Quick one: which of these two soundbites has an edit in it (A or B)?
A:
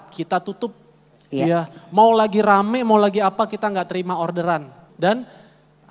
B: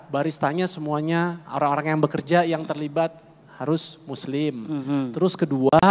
A